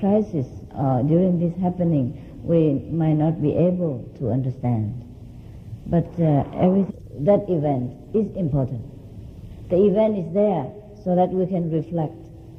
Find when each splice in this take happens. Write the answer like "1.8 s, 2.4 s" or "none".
none